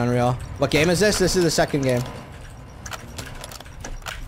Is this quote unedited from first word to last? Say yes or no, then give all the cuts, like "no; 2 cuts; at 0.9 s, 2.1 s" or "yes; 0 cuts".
yes; 0 cuts